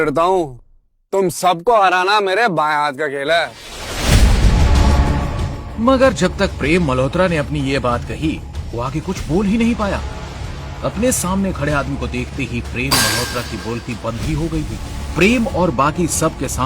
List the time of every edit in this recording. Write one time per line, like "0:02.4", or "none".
0:00.9